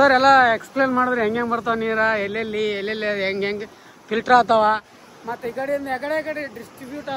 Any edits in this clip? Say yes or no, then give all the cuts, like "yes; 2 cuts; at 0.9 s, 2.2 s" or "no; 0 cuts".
no; 0 cuts